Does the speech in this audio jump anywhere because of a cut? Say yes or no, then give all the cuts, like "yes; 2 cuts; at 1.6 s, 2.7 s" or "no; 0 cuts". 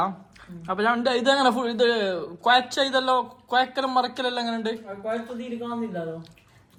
no; 0 cuts